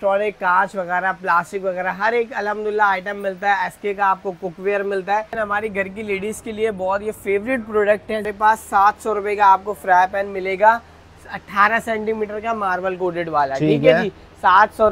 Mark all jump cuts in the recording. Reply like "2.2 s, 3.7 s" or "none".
5.3 s, 8.3 s